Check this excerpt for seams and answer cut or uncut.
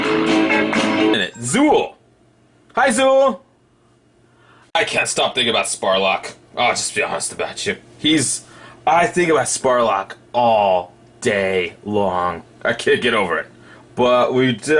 uncut